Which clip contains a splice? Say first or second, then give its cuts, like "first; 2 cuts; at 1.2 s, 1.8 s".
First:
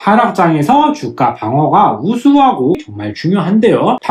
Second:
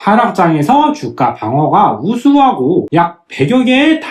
first; 1 cut; at 2.8 s